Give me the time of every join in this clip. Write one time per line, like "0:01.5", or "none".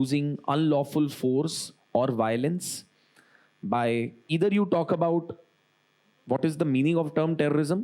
0:04.2